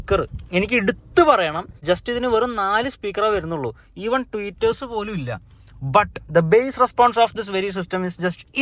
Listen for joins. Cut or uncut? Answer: cut